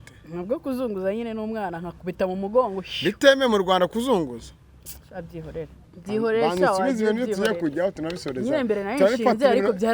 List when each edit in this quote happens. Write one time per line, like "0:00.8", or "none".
0:05.8

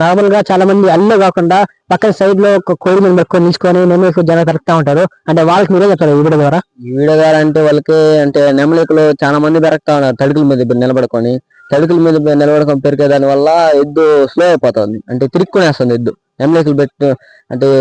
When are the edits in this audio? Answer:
0:02.7

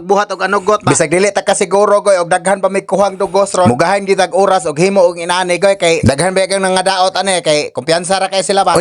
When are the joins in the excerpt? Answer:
none

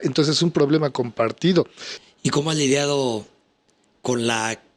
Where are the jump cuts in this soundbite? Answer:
0:01.9

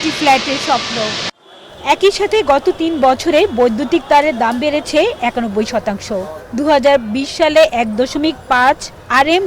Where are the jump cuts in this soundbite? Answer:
none

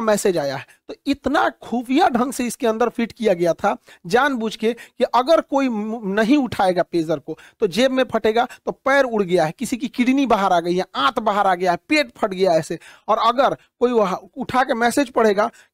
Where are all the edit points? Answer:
none

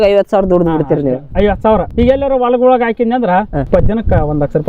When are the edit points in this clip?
0:01.9
0:03.7

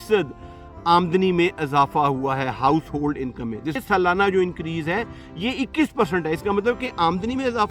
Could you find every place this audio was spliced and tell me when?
0:03.8

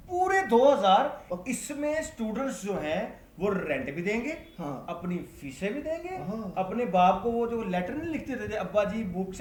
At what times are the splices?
none

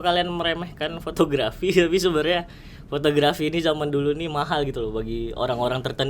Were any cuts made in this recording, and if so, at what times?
none

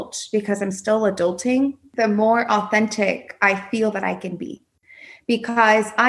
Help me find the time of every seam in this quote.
0:01.8

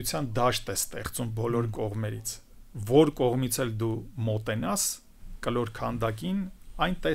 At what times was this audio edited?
none

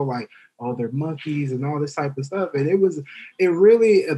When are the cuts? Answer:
none

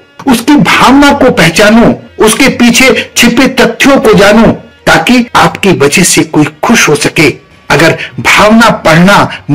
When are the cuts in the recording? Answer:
0:02.1
0:05.0

